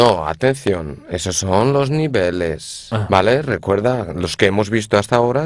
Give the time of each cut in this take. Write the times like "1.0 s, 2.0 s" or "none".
none